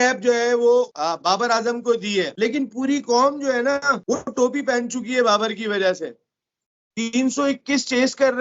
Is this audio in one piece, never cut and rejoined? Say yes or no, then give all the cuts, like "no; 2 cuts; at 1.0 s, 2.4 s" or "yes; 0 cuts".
no; 3 cuts; at 0.9 s, 2.3 s, 4.0 s